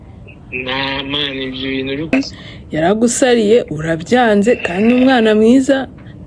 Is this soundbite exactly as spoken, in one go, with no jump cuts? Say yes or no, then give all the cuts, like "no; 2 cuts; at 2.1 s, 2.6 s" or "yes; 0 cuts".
no; 1 cut; at 2.1 s